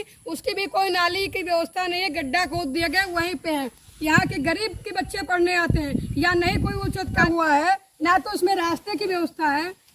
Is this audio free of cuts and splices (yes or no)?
no